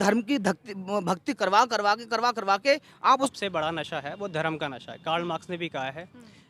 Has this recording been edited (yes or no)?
yes